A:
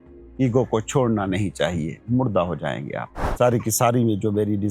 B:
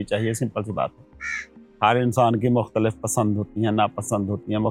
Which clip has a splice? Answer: A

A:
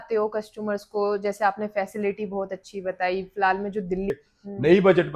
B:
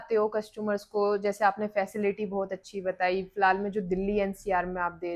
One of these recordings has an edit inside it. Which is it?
A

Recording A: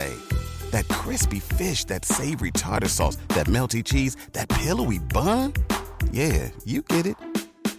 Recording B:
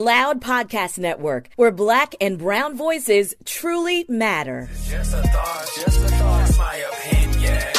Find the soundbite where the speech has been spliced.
B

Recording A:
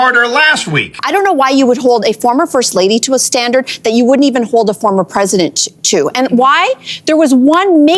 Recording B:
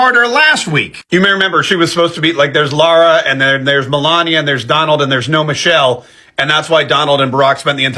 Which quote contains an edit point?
A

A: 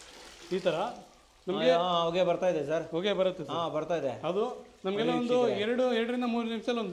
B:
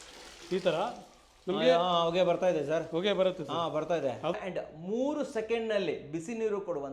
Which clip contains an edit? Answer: B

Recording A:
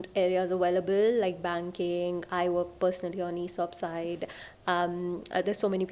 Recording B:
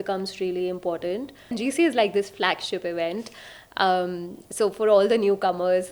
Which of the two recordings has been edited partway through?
B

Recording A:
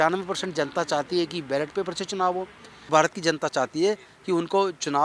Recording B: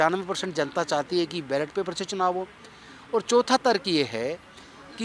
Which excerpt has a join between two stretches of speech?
A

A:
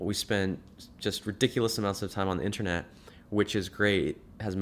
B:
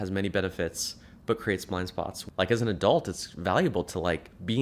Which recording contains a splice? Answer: B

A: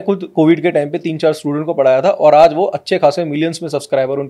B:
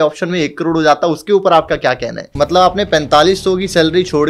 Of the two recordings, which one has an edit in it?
B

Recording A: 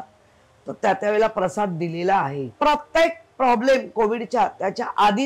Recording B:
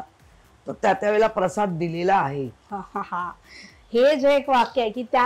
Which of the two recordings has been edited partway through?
A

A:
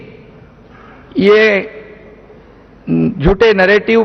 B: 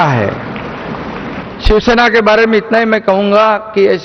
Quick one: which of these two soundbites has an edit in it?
B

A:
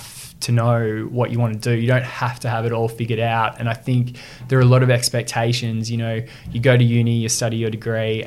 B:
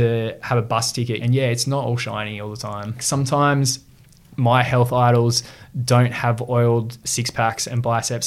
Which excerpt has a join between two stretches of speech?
B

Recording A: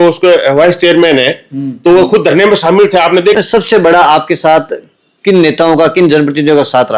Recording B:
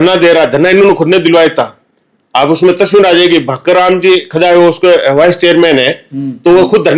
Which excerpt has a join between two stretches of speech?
A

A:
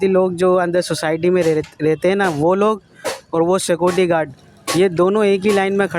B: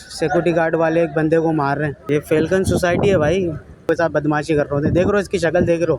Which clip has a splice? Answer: B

